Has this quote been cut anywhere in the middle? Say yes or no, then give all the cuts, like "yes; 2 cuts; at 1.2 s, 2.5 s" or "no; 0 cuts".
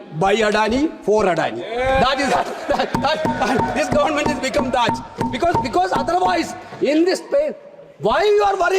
no; 0 cuts